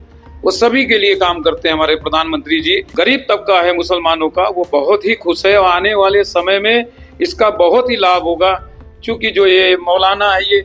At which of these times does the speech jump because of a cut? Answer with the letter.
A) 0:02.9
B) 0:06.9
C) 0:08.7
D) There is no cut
A